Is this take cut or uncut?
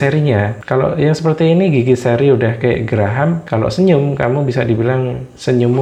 uncut